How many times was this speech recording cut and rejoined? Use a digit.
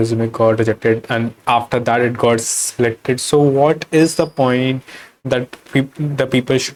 0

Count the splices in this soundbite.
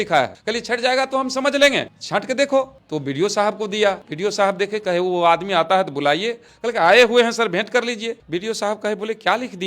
2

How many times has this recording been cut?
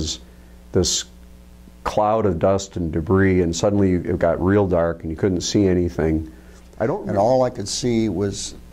1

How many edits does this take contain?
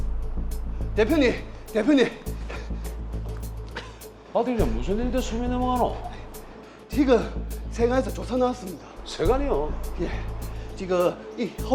1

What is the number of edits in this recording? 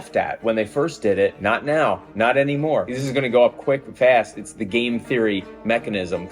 2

